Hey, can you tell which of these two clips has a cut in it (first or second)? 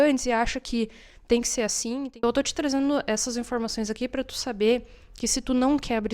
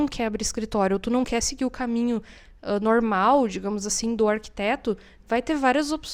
first